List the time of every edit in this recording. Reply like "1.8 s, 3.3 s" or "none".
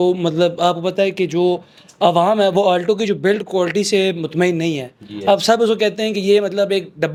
none